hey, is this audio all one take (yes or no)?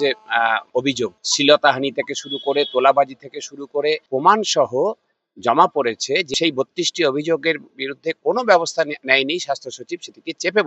no